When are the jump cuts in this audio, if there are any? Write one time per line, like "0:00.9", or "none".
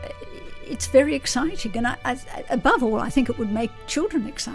none